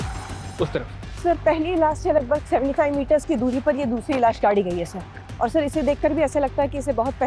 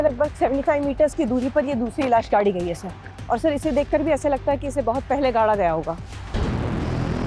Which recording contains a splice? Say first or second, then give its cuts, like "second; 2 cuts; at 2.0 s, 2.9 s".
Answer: second; 1 cut; at 6.3 s